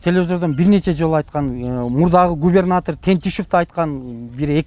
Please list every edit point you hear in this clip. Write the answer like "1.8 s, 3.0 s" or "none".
none